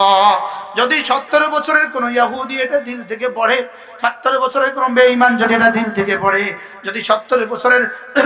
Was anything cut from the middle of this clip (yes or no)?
no